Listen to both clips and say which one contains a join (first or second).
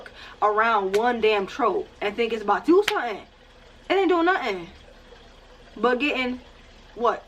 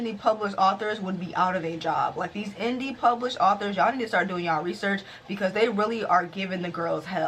first